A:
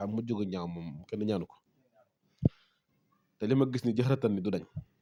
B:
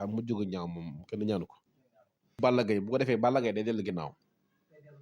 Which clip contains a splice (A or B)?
B